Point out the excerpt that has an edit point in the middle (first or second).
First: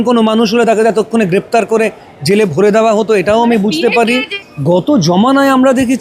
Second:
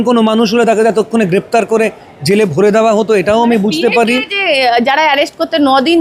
first